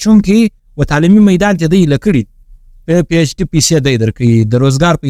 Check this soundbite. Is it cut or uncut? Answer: uncut